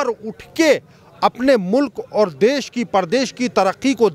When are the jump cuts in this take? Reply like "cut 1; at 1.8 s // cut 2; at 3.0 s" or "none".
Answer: none